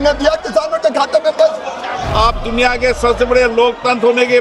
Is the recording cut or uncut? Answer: cut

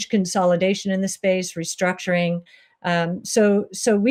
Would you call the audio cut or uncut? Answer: uncut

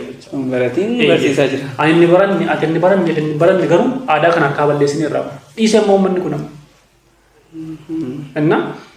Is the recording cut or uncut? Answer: uncut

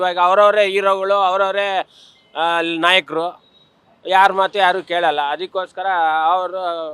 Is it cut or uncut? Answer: uncut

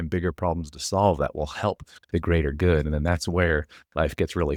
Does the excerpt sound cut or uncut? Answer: uncut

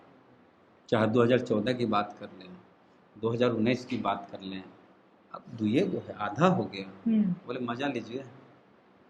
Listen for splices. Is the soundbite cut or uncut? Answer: uncut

